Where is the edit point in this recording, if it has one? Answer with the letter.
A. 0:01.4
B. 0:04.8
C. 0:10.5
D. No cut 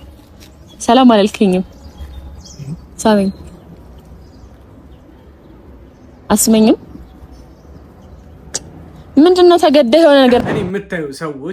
C